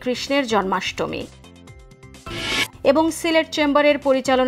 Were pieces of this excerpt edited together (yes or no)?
no